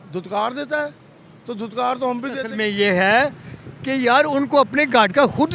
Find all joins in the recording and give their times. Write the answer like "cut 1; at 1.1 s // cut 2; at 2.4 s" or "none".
cut 1; at 2.5 s